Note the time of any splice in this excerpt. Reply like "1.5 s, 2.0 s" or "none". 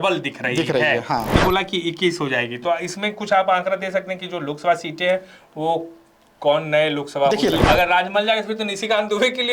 1.3 s, 7.6 s

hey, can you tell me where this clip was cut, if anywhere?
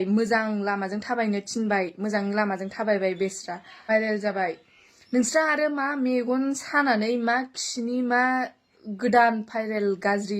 3.9 s

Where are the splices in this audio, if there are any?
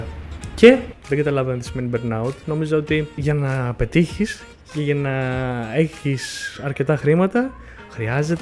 1.0 s, 3.2 s

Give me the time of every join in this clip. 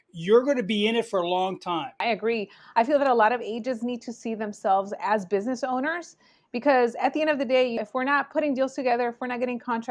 2.0 s, 7.8 s

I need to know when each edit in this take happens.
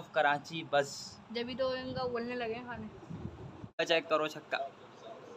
3.8 s

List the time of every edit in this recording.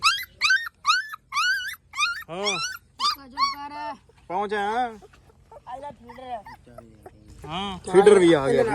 7.7 s

